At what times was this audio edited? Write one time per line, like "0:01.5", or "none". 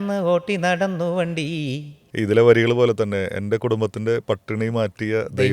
0:02.0